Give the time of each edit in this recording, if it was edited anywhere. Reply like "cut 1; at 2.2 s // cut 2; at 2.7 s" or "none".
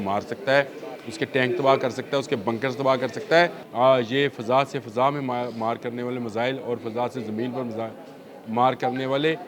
cut 1; at 3.6 s